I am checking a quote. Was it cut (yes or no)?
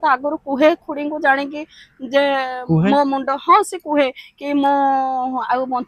no